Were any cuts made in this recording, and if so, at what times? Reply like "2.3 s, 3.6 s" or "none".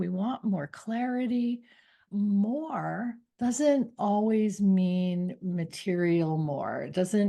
2.0 s, 3.2 s